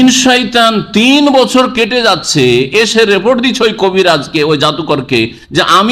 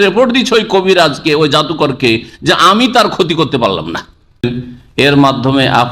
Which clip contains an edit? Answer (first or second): second